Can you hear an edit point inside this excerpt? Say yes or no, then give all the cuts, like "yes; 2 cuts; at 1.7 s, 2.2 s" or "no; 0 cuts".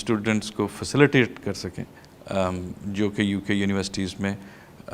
no; 0 cuts